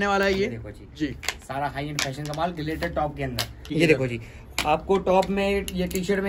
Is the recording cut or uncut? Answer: cut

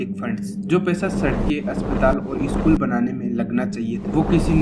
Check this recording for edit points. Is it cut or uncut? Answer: uncut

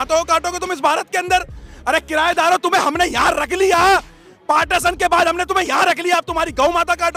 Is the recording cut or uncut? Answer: uncut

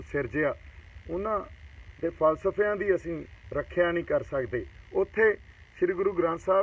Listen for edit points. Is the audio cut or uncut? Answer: cut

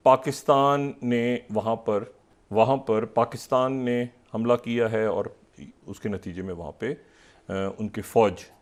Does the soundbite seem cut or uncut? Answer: uncut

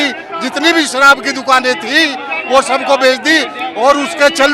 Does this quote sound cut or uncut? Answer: uncut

